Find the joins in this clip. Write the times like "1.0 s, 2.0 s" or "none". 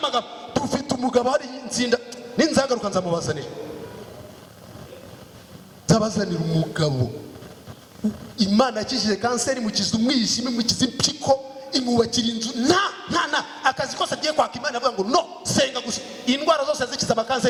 none